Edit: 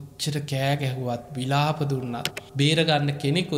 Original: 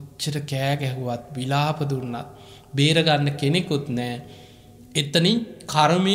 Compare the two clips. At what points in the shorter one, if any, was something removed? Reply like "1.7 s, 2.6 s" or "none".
2.4 s